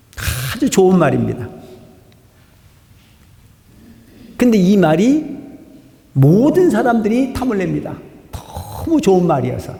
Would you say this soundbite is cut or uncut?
uncut